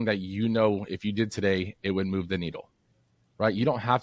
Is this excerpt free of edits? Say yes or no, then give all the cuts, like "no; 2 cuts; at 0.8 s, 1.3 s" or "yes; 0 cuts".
yes; 0 cuts